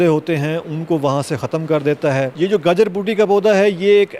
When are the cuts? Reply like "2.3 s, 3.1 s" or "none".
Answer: 2.3 s